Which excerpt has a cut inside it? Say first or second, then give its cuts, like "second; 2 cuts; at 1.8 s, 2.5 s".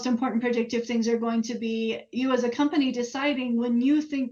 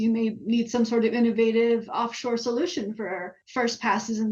second; 1 cut; at 3.4 s